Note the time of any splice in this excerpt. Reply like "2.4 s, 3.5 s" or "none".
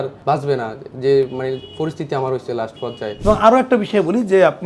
3.1 s